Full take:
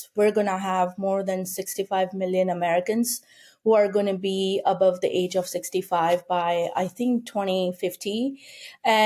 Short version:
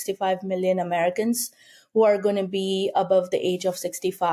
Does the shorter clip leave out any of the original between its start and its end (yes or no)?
no